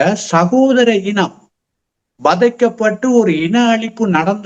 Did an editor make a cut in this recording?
no; 0 cuts

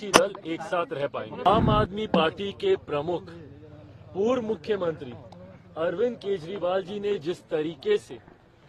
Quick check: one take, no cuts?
no; 1 cut; at 1.5 s

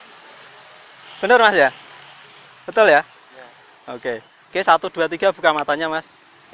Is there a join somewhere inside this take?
yes; 1 cut; at 4.3 s

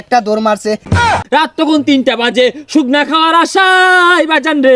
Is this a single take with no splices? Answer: no; 1 cut; at 1.1 s

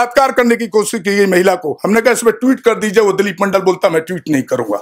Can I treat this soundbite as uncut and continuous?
yes; 0 cuts

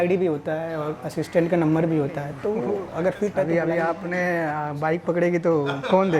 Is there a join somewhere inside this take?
yes; 1 cut; at 3.3 s

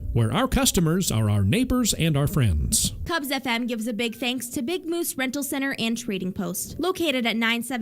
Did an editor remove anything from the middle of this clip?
yes; 1 cut; at 3.2 s

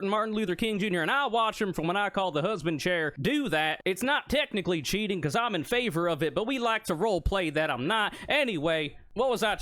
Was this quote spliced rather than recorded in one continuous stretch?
no; 0 cuts

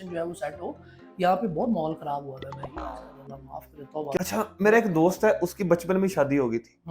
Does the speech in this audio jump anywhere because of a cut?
yes; 1 cut; at 4.2 s

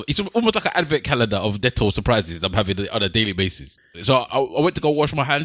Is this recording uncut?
no; 1 cut; at 3.8 s

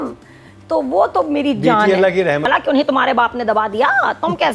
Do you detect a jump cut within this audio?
yes; 1 cut; at 2.5 s

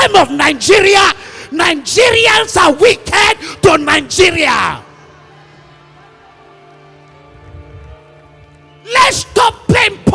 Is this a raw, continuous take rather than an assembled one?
yes; 0 cuts

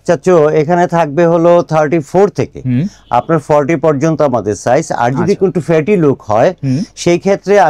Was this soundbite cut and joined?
no; 0 cuts

